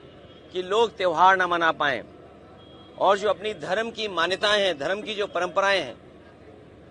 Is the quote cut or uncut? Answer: uncut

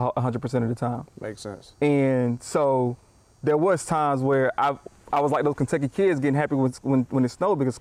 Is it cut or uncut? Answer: uncut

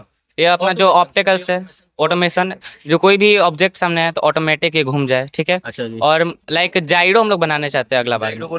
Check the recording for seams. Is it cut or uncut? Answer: uncut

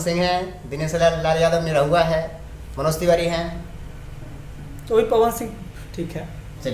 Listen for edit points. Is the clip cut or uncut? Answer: uncut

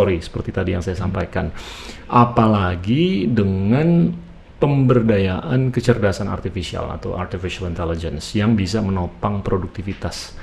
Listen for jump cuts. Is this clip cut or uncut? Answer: uncut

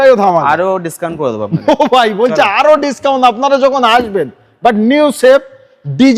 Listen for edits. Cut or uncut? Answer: uncut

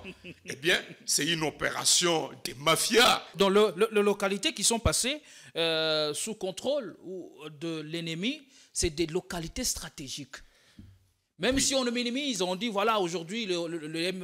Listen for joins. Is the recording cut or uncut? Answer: cut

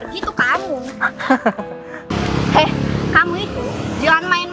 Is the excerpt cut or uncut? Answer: uncut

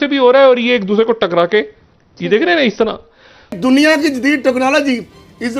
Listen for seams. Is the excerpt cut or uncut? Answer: cut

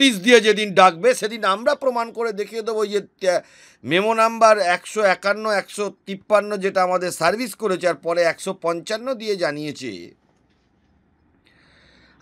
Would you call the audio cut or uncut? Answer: uncut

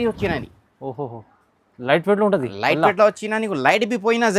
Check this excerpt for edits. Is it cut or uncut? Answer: uncut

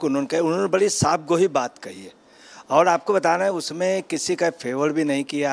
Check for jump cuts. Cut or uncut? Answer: uncut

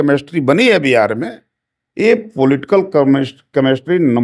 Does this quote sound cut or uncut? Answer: uncut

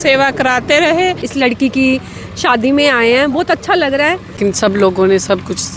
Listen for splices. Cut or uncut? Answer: cut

